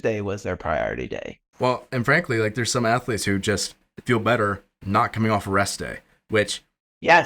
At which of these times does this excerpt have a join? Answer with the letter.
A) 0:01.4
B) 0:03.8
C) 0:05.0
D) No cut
A